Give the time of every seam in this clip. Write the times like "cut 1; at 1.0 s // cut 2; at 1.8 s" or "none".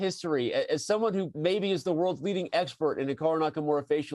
cut 1; at 1.3 s